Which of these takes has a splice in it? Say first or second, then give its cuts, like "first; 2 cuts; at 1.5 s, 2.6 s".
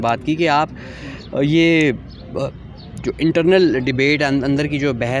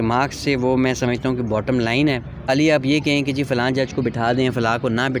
second; 1 cut; at 2.4 s